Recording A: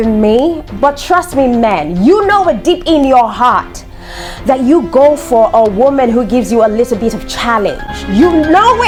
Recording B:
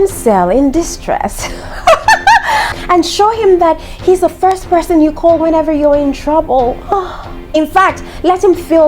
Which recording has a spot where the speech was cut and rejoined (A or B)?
B